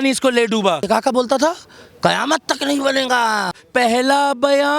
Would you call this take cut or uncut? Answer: cut